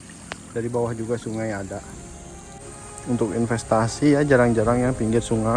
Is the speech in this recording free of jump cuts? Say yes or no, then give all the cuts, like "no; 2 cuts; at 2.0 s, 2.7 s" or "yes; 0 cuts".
no; 1 cut; at 2.6 s